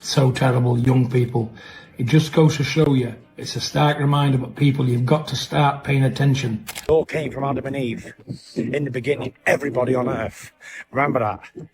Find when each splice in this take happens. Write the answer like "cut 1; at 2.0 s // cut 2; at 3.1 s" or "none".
cut 1; at 6.9 s